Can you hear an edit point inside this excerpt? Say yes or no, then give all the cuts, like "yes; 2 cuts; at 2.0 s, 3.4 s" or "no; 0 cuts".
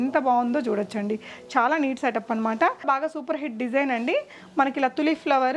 yes; 1 cut; at 2.8 s